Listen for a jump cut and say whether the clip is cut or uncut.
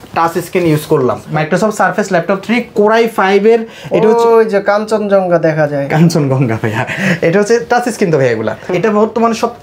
cut